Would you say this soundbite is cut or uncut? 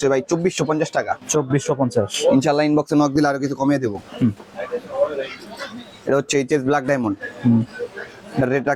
uncut